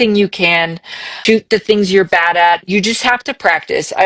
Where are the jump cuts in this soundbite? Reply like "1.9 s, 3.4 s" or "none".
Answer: 1.2 s